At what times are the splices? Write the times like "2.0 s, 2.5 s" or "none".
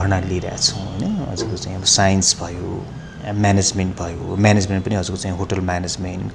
none